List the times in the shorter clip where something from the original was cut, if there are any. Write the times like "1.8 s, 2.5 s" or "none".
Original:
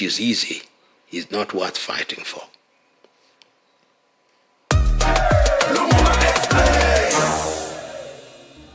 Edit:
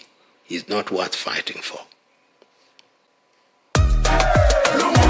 3.1 s